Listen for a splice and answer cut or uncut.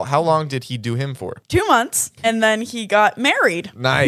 cut